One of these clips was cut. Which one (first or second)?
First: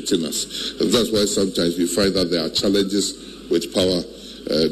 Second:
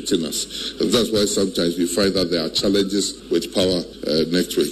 second